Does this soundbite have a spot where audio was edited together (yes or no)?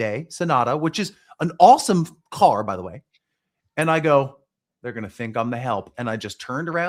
no